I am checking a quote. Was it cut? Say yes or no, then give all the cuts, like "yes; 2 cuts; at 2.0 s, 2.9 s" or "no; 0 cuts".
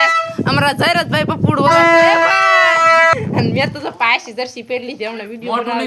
yes; 1 cut; at 3.2 s